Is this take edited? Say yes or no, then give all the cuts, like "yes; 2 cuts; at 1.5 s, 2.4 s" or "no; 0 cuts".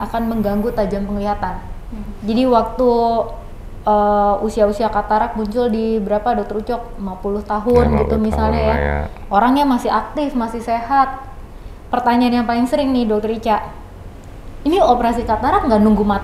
no; 0 cuts